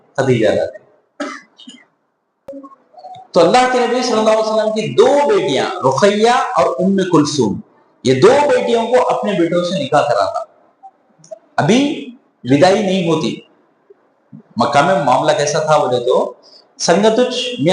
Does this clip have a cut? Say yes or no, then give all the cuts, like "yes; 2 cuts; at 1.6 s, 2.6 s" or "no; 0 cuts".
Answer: yes; 1 cut; at 2.5 s